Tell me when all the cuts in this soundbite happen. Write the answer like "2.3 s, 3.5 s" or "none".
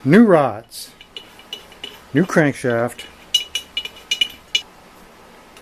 4.6 s